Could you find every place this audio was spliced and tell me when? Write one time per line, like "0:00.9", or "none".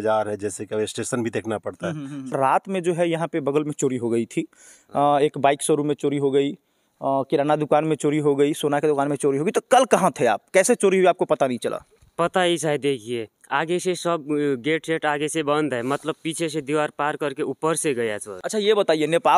0:02.3
0:18.3